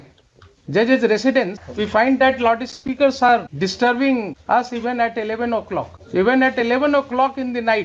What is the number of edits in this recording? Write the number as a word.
four